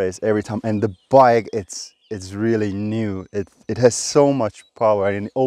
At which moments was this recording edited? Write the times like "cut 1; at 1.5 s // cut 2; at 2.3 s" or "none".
none